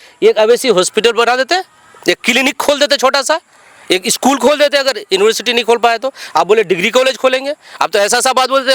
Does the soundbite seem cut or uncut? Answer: uncut